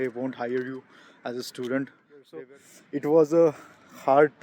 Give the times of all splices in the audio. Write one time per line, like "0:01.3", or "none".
0:02.4